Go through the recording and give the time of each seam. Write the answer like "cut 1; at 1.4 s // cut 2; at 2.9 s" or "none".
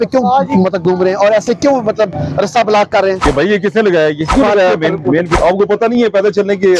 cut 1; at 3.2 s // cut 2; at 4.3 s // cut 3; at 5.4 s